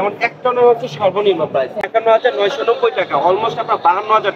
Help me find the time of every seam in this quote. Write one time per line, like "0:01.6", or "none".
0:01.9

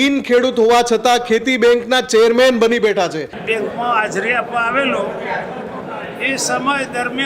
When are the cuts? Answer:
0:03.3

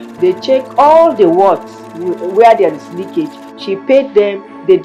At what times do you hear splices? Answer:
none

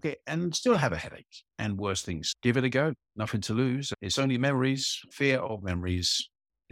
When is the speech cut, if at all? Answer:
0:02.3
0:04.0
0:05.0

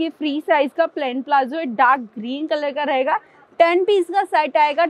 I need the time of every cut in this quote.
none

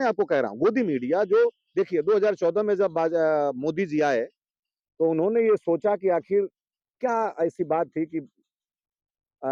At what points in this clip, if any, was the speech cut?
none

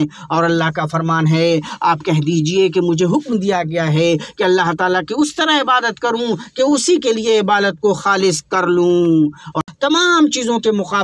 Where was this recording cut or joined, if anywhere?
0:09.6

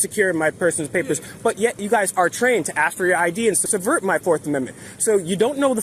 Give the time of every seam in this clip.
0:01.8
0:03.6

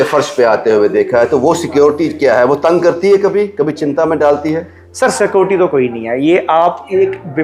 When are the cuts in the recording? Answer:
none

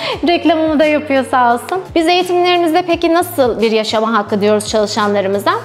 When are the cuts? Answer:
0:01.8

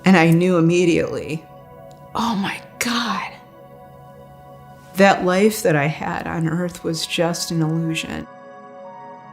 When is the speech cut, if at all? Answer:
0:08.3

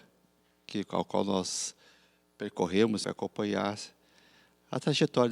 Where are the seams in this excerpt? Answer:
0:03.0

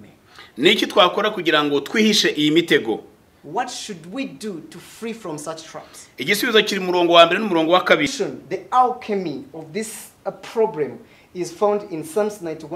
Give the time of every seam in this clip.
0:08.1

